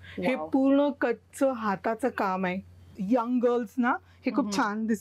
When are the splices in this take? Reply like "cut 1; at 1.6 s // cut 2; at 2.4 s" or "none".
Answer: cut 1; at 2.9 s